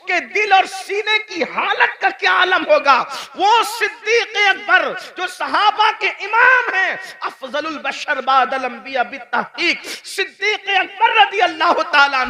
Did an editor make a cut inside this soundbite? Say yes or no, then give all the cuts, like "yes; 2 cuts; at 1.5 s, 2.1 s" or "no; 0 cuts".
no; 0 cuts